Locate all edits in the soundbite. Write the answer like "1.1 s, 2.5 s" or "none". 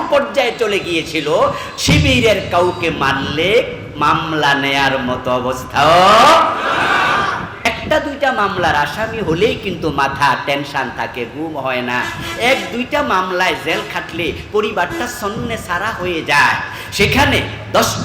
7.7 s